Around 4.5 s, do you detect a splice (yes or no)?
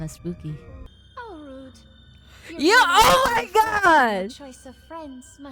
no